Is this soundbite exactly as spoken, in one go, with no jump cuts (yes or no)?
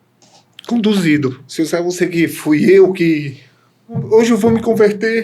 no